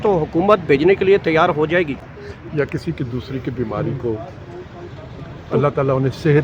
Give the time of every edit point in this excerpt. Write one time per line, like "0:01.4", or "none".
0:02.1